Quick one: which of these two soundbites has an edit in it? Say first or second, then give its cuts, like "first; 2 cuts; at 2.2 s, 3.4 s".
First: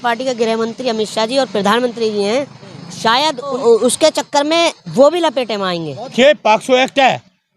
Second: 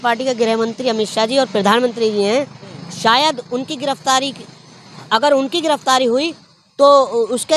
first; 2 cuts; at 3.6 s, 6.1 s